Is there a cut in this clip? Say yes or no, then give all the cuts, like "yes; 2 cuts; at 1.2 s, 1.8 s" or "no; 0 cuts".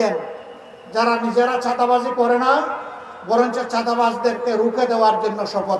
no; 0 cuts